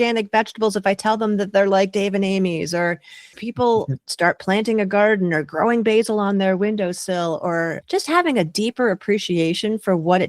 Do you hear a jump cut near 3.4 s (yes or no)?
yes